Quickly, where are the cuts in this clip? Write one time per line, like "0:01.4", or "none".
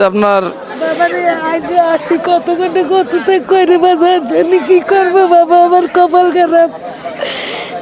none